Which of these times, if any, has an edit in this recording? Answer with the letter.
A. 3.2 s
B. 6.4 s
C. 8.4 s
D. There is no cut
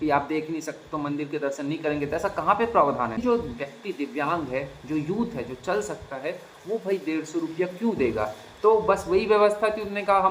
A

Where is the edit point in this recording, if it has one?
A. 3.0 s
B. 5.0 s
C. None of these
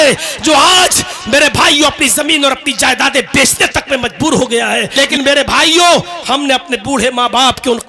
B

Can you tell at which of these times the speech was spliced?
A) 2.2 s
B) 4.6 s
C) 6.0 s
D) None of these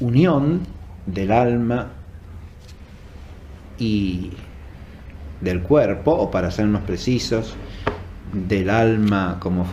C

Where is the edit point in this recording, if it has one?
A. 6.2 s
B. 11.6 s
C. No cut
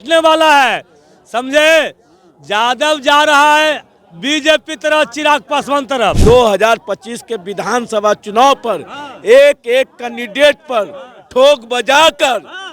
A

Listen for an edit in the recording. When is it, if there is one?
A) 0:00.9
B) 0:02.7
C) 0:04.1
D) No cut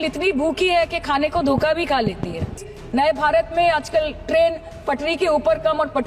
B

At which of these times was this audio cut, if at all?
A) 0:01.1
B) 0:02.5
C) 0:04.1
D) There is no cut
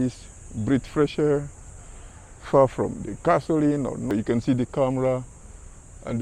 C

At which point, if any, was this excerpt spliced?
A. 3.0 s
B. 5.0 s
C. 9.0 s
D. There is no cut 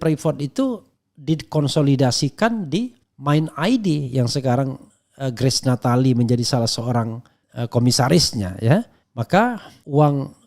C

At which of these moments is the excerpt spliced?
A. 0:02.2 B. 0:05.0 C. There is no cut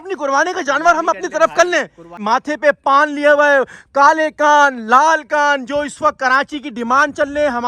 A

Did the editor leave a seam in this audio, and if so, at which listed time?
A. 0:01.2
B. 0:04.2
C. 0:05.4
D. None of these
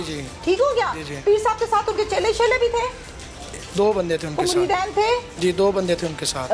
D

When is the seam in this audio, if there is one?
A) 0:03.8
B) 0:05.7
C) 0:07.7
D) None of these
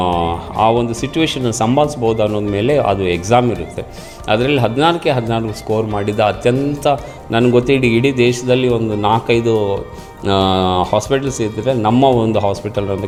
D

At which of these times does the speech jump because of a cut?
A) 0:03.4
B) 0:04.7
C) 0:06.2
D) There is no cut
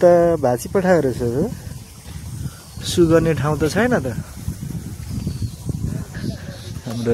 C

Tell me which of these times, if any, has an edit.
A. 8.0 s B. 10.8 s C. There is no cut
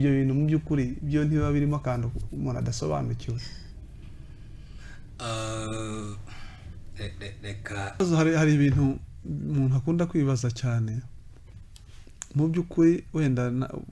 A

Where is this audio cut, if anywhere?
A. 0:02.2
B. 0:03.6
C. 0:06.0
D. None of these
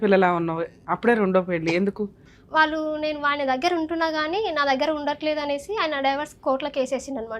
A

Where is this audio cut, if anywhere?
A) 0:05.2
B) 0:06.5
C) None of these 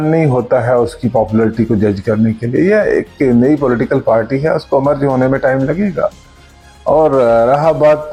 C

